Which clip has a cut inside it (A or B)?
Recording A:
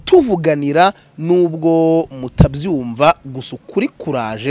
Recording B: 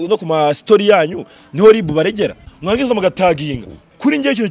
B